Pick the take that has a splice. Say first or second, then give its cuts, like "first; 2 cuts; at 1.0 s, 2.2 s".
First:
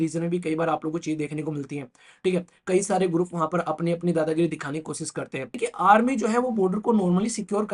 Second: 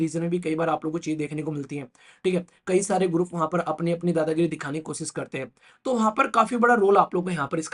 first; 1 cut; at 5.5 s